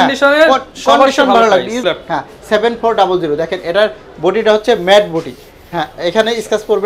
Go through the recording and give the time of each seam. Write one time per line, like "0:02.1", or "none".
0:01.8